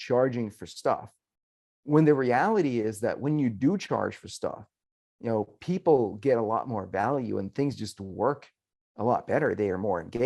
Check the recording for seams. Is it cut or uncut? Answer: uncut